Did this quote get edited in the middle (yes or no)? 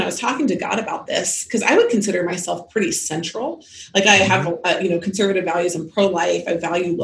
no